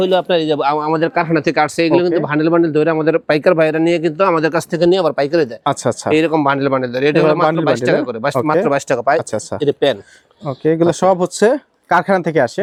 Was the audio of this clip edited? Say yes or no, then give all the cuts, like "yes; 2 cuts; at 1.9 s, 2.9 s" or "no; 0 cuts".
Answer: no; 0 cuts